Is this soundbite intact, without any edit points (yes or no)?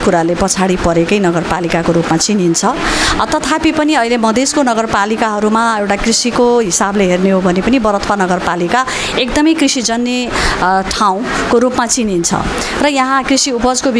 yes